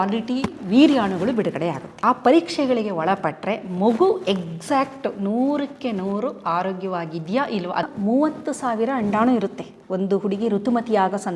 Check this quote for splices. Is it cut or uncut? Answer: cut